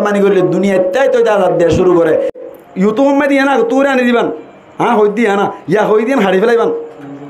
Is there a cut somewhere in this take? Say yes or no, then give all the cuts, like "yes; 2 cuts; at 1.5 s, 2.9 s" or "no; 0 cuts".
yes; 1 cut; at 2.4 s